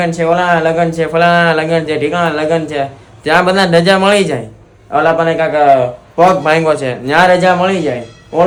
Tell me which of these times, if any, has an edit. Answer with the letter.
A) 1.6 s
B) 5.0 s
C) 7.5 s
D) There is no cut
D